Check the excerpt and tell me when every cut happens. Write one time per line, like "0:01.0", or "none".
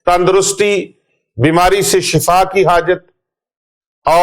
none